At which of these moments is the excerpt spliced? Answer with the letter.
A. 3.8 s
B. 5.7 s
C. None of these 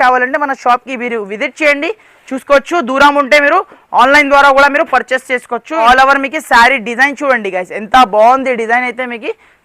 B